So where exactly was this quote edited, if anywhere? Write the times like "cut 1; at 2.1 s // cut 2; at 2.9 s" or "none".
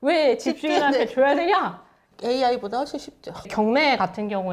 cut 1; at 2.0 s